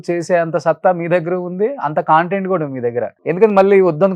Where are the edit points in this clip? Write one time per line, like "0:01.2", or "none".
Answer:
0:03.2